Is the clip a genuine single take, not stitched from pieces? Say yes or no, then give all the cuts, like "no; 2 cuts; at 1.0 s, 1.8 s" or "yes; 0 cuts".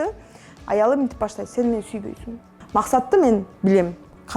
no; 1 cut; at 2.6 s